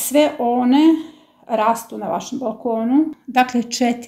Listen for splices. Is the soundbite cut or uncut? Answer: cut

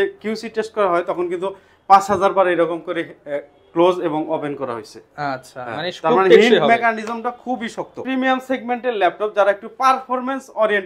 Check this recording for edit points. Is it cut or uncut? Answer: uncut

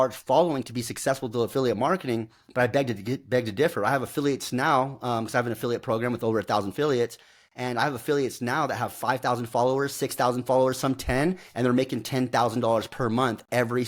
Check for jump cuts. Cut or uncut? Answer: uncut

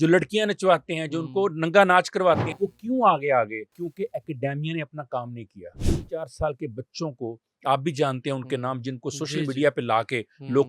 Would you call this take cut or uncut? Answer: cut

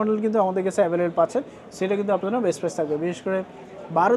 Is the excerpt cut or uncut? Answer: uncut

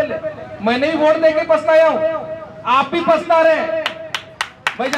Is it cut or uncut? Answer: uncut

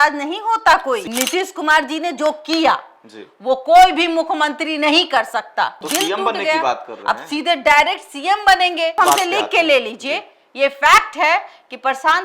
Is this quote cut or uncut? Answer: cut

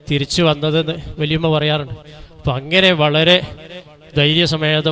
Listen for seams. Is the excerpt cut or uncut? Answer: uncut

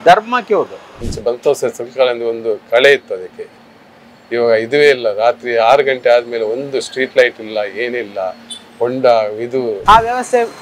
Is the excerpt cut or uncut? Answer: cut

